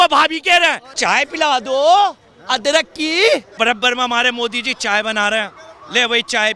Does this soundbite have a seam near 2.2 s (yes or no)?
no